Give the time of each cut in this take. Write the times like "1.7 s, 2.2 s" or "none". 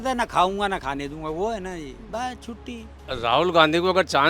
2.9 s